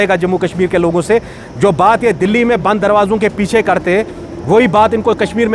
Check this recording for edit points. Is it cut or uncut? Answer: uncut